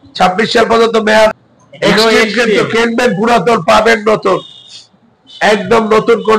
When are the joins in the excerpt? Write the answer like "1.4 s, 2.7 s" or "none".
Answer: 1.3 s